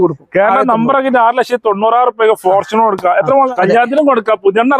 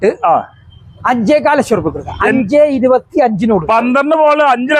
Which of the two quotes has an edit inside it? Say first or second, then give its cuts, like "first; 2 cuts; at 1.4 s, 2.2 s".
first; 1 cut; at 3.5 s